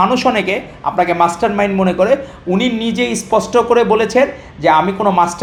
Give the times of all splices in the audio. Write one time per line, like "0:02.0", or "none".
none